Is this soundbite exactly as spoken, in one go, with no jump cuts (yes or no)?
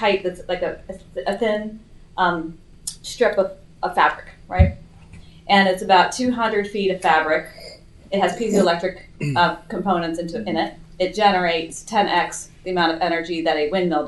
yes